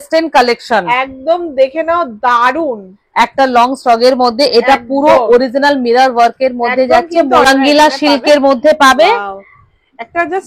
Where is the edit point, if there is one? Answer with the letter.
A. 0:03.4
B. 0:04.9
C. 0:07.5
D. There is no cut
C